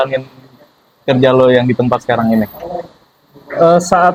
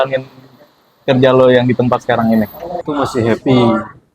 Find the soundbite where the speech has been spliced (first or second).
second